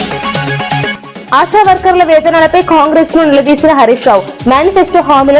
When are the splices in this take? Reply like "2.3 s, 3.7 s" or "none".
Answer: 1.1 s